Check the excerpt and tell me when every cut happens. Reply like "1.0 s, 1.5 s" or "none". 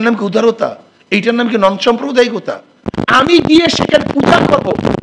none